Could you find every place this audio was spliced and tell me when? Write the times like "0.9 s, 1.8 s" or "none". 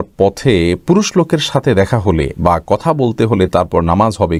none